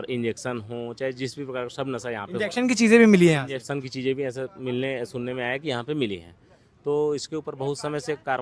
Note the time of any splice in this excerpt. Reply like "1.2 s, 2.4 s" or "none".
none

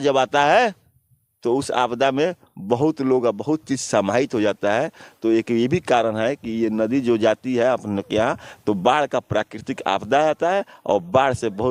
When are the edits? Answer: none

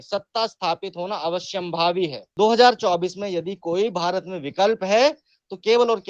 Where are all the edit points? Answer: 2.2 s

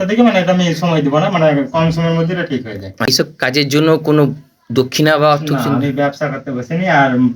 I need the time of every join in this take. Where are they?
3.1 s

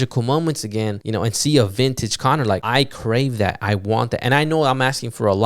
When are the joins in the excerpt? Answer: 1.0 s, 2.6 s

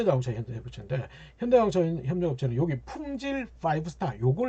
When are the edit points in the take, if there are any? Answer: none

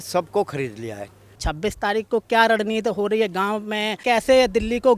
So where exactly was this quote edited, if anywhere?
1.4 s, 4.0 s

